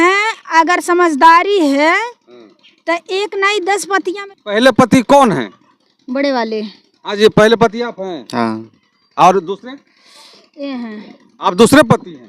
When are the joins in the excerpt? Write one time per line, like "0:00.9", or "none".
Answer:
0:04.2